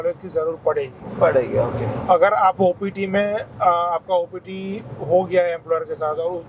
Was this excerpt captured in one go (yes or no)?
yes